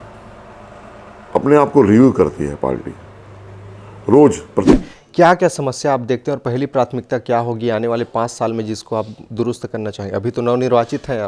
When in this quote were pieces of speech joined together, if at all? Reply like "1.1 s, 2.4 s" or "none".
4.7 s